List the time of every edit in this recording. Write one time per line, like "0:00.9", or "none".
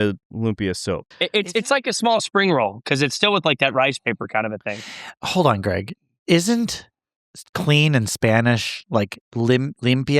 0:01.1